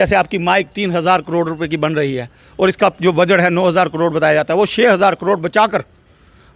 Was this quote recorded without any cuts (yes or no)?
yes